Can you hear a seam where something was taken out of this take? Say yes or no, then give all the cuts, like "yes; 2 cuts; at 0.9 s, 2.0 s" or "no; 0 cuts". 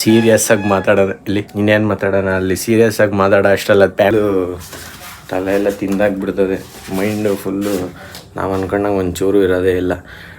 yes; 2 cuts; at 1.5 s, 4.1 s